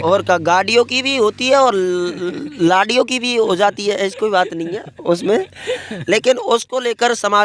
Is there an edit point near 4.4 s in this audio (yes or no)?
no